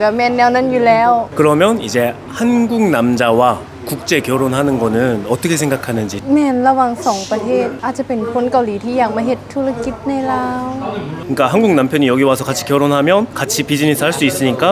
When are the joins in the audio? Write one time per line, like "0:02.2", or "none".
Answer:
0:01.3